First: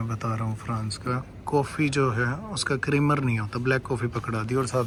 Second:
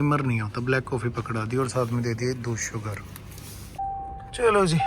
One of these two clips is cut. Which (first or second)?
second